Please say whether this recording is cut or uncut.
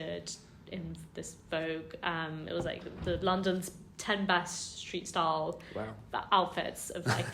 uncut